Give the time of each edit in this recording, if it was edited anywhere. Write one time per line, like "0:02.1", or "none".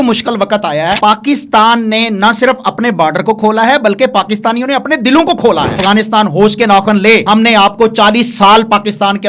0:01.0
0:05.8
0:07.2